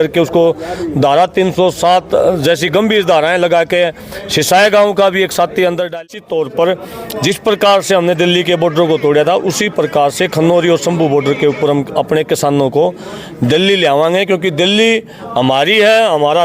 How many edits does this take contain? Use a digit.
1